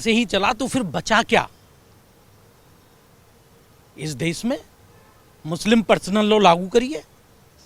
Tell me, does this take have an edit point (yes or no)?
no